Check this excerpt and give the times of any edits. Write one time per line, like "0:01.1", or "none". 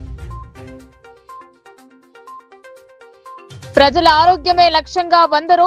0:02.5
0:03.5

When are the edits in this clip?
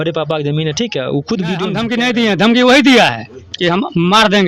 0:01.8

